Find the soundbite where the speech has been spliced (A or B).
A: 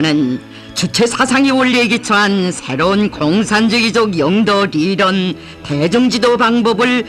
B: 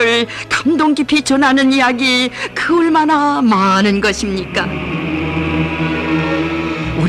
B